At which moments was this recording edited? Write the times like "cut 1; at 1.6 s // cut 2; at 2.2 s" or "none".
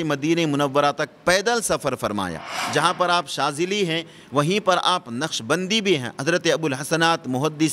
cut 1; at 2.6 s